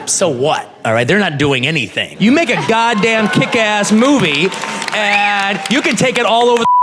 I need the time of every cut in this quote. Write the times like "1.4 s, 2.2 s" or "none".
2.1 s